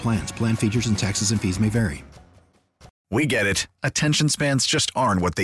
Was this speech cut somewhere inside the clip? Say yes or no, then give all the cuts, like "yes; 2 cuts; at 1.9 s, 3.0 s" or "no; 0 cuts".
yes; 1 cut; at 2.9 s